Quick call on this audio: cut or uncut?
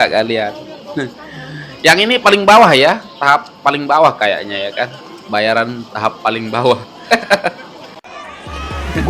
cut